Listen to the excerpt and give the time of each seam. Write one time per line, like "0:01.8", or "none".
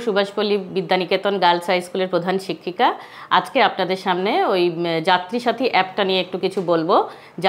none